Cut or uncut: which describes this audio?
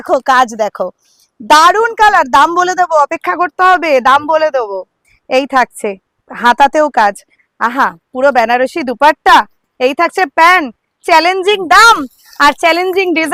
uncut